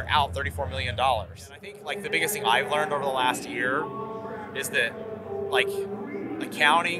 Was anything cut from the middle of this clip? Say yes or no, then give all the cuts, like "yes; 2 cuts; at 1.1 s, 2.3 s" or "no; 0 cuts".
yes; 1 cut; at 1.8 s